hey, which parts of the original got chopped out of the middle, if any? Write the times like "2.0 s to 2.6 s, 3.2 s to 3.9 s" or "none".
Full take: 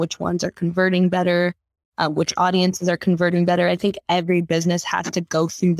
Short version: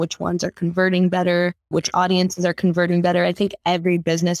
1.7 s to 2.1 s